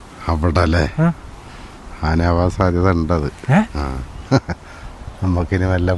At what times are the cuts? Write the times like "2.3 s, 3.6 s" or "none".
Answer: none